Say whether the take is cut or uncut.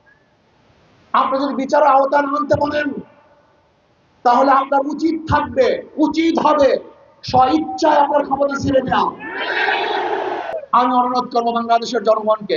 cut